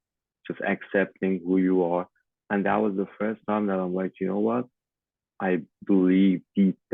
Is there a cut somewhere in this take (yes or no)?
yes